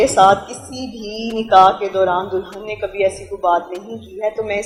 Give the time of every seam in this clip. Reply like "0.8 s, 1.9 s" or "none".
none